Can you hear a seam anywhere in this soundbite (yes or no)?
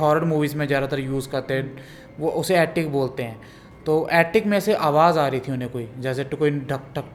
no